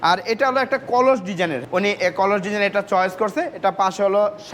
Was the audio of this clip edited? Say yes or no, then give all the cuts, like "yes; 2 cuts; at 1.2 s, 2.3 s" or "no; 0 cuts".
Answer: yes; 1 cut; at 1.6 s